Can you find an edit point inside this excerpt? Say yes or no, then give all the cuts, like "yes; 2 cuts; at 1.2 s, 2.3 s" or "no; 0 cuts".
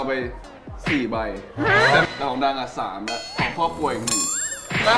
yes; 1 cut; at 2.0 s